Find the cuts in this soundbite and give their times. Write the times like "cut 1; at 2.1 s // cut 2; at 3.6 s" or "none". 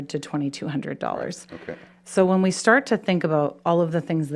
none